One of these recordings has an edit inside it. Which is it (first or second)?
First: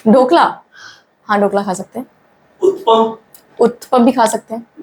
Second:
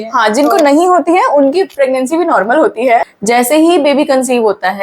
second